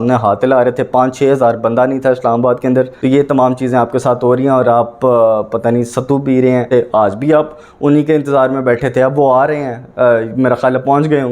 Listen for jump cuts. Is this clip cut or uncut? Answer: cut